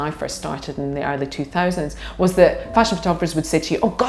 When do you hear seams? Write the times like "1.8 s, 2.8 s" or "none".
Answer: 2.7 s